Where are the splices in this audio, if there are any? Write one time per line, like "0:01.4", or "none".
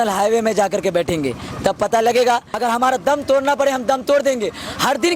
0:02.5